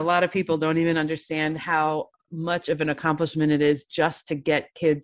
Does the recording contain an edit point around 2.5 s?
no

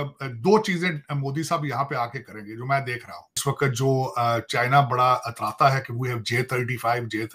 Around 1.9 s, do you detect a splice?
no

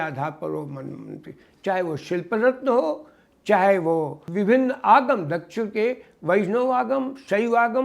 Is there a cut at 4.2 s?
yes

